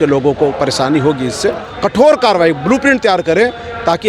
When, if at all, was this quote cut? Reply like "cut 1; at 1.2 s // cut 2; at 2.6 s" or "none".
cut 1; at 1.7 s